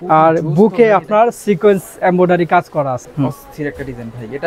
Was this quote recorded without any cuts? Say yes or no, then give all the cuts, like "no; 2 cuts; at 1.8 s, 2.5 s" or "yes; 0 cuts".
no; 1 cut; at 3.0 s